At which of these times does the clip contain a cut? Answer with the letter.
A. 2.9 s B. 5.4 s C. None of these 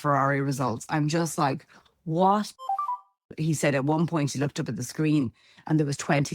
A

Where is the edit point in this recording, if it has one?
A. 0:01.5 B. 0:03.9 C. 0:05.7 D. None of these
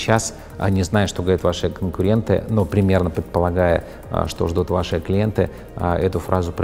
D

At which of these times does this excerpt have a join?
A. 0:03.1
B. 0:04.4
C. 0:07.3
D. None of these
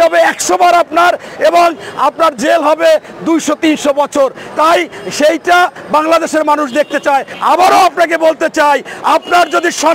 C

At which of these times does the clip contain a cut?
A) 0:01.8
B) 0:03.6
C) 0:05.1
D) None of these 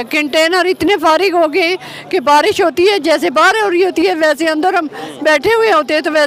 D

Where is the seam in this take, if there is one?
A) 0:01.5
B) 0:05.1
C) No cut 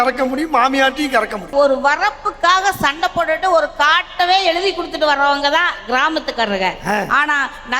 A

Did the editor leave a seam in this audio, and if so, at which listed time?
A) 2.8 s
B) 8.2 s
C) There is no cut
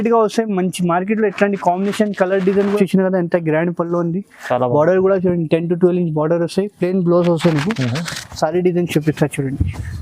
A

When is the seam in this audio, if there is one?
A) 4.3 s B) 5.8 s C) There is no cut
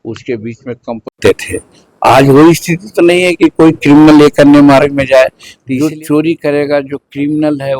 B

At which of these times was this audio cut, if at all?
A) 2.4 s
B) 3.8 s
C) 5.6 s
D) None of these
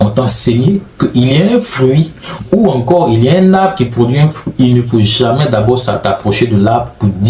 D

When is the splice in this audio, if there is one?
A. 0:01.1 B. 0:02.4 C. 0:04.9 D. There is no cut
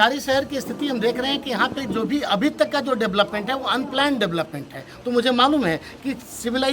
C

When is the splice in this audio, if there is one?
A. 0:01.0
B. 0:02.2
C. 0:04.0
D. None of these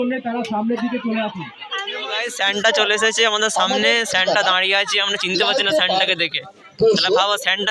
B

